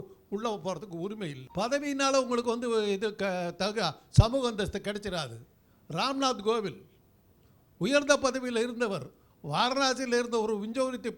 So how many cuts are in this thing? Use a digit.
1